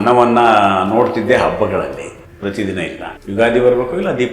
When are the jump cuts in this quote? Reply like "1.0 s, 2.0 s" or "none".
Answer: 2.2 s, 3.1 s